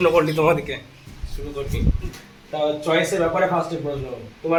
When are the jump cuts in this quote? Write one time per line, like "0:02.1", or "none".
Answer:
none